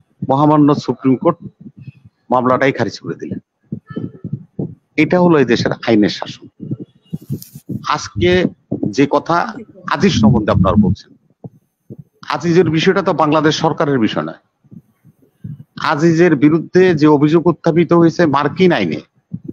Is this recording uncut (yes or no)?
yes